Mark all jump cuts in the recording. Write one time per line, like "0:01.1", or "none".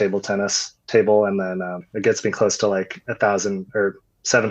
0:01.9